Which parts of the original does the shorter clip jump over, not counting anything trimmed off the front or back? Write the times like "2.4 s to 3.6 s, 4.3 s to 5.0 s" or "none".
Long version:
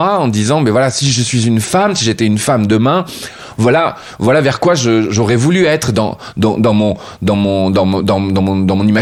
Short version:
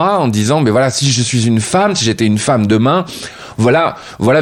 none